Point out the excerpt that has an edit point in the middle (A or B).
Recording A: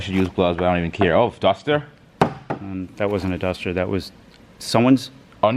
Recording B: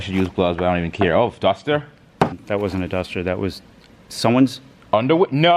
B